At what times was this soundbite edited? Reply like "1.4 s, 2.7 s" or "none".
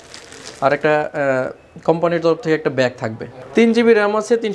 3.4 s